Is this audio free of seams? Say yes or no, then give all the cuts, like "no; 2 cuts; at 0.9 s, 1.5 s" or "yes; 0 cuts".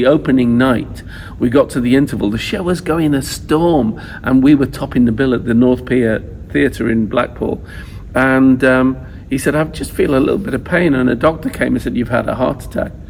yes; 0 cuts